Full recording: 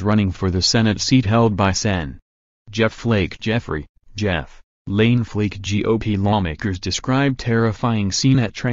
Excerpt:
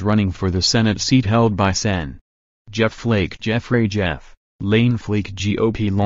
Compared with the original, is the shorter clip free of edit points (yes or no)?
no